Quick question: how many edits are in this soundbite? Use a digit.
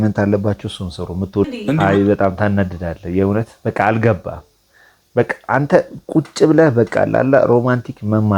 1